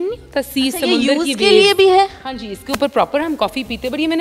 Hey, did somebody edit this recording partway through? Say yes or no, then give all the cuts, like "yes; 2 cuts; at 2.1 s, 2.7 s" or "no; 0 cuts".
no; 0 cuts